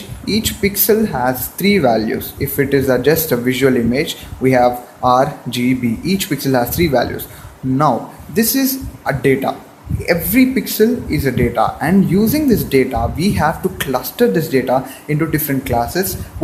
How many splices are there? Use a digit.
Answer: 0